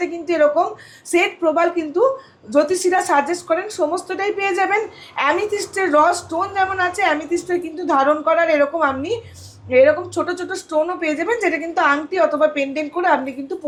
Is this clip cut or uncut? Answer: uncut